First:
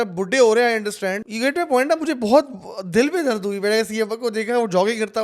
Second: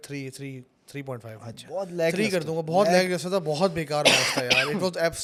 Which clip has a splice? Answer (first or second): first